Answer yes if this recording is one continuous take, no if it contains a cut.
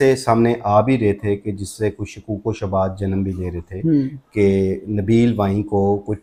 yes